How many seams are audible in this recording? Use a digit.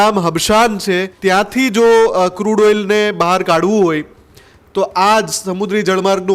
1